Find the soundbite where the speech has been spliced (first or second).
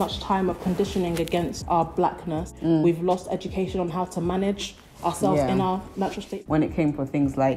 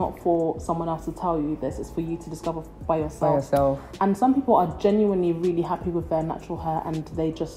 first